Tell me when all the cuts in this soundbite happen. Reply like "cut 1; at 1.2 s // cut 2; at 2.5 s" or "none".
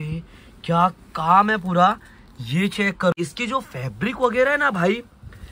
cut 1; at 3.1 s